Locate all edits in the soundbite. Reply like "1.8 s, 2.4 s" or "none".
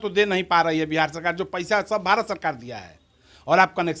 none